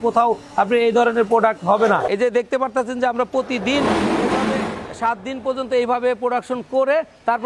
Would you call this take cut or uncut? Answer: cut